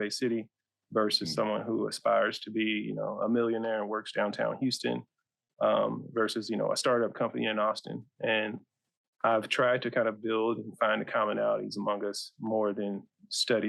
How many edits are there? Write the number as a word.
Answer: zero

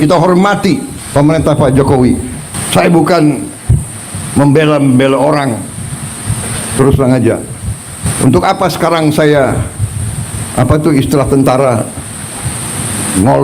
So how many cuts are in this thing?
three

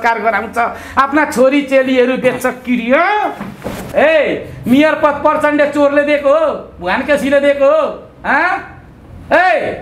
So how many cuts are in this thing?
one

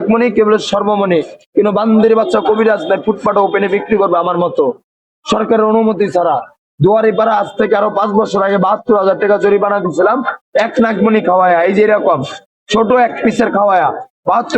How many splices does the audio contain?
zero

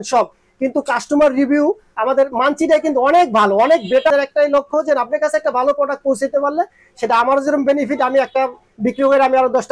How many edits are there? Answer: one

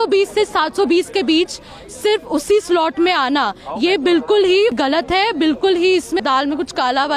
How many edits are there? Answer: two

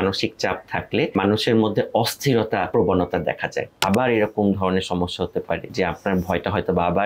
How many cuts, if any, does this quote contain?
four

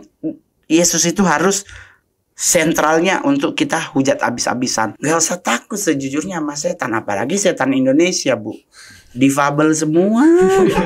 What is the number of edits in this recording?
one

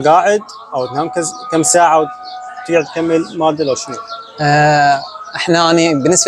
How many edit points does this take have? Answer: zero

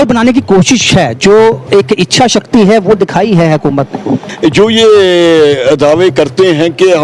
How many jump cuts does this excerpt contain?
one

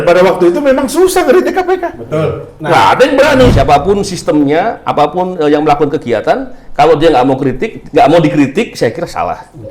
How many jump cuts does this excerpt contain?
one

